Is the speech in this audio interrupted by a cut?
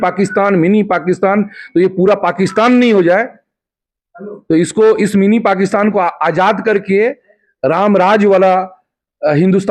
no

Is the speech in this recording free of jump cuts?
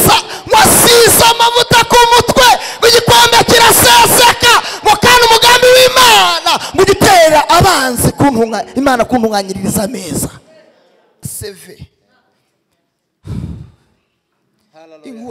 no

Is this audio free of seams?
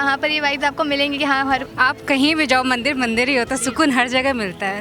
no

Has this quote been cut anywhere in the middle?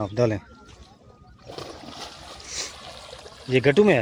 no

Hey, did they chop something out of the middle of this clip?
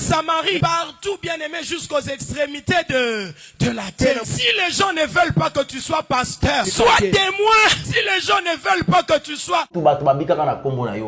yes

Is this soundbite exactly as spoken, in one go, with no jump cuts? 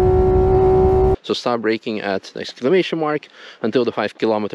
no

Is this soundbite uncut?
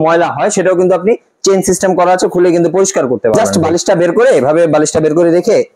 no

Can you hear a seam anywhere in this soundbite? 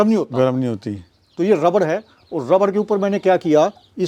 no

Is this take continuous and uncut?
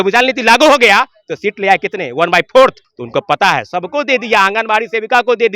no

